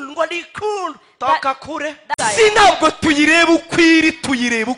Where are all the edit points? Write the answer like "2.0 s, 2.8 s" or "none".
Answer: 2.2 s